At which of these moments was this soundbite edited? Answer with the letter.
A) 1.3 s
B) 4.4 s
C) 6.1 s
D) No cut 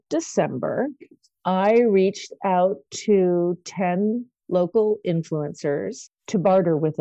C